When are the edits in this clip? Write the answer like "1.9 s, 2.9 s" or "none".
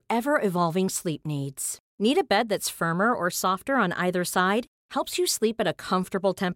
none